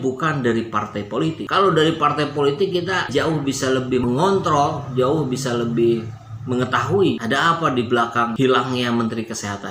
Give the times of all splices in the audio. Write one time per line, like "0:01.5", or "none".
0:03.1
0:07.2